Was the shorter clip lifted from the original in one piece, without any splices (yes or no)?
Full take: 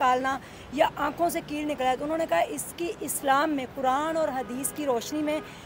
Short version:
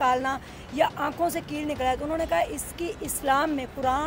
yes